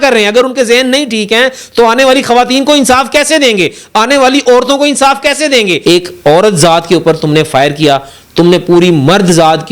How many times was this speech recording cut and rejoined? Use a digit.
1